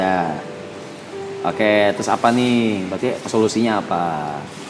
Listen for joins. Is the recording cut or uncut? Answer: uncut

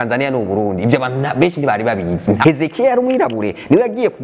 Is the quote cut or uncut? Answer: cut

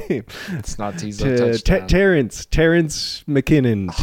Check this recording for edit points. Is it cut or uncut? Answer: uncut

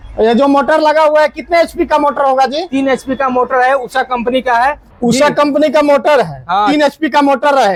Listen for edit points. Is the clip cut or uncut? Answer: uncut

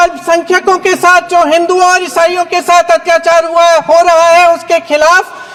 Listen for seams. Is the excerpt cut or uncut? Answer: uncut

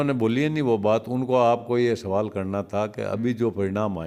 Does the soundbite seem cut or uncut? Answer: uncut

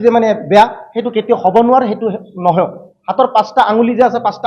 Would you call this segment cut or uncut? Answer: uncut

